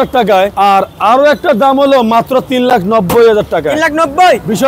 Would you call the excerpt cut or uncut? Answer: uncut